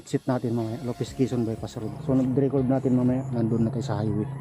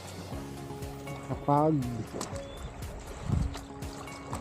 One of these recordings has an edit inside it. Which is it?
first; 1 cut; at 2.0 s

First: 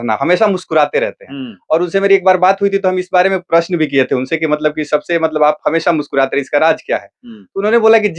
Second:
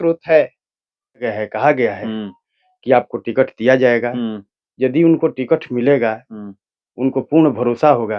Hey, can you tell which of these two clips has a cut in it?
second; 1 cut; at 1.3 s

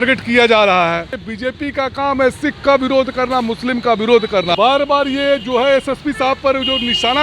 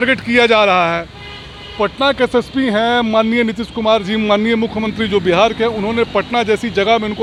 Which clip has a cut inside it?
first; 2 cuts; at 1.2 s, 4.5 s

